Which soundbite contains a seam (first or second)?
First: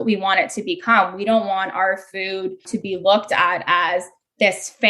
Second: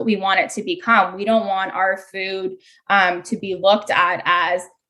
first